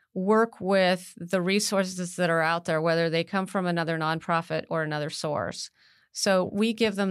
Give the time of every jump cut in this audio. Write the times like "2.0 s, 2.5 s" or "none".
none